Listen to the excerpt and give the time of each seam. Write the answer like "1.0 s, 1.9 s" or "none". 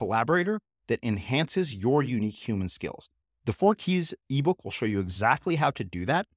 none